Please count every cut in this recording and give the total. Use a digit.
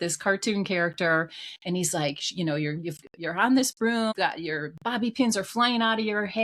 1